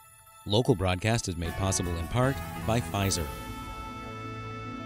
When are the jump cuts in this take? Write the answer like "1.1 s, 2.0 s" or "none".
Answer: 3.3 s